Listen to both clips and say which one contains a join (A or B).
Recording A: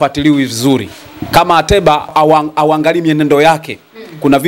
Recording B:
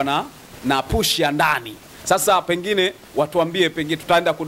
A